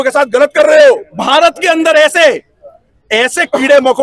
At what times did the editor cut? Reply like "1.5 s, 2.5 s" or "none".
1.1 s

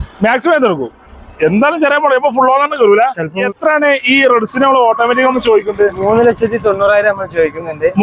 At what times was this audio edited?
3.4 s

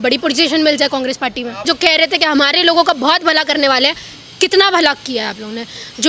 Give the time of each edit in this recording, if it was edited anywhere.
1.6 s

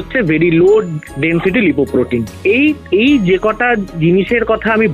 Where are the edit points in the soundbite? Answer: none

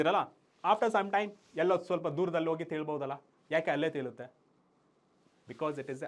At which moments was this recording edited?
none

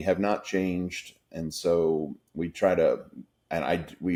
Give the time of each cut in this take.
none

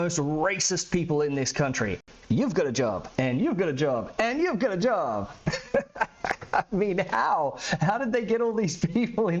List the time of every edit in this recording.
none

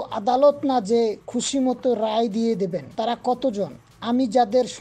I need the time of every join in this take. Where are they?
2.8 s

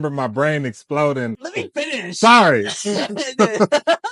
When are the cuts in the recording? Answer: 1.4 s

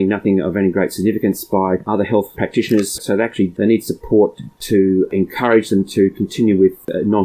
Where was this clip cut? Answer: 4.6 s

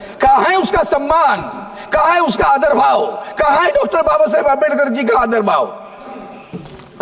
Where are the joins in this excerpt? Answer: none

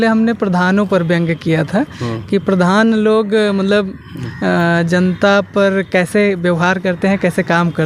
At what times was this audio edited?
none

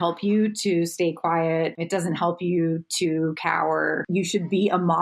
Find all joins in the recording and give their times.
1.8 s, 4.1 s

